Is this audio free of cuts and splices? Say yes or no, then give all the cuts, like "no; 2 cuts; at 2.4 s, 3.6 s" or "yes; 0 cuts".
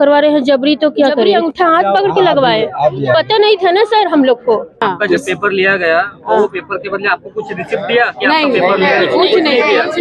no; 2 cuts; at 1.3 s, 4.8 s